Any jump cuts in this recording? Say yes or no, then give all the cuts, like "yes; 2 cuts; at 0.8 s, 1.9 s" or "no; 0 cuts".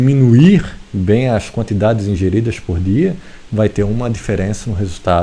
no; 0 cuts